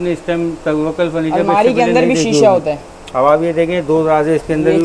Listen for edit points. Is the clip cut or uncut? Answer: uncut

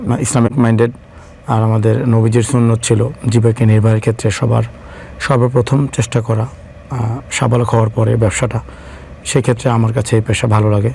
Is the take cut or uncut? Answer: uncut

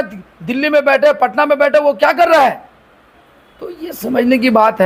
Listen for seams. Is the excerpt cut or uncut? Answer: uncut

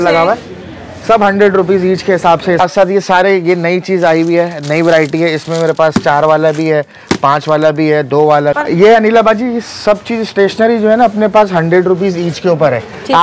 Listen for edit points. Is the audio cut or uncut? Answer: cut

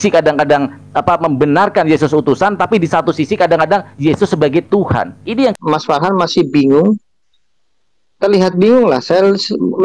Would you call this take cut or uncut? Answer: cut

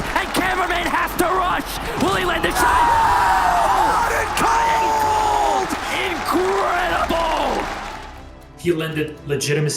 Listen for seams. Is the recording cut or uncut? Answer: cut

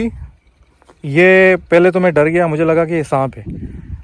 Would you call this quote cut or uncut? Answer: uncut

